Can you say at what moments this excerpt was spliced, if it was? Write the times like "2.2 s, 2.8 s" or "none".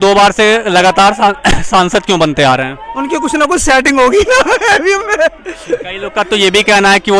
none

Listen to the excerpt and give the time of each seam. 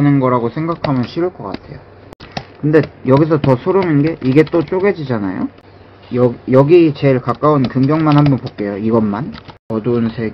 none

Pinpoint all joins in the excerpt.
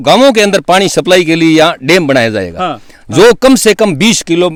none

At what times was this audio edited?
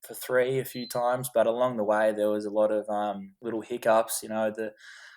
3.3 s

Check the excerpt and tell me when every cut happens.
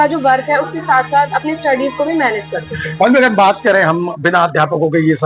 none

